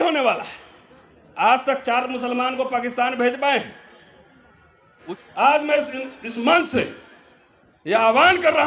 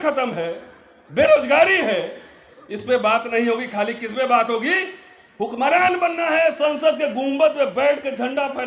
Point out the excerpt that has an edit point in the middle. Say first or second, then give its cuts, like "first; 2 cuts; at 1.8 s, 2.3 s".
first; 1 cut; at 5.0 s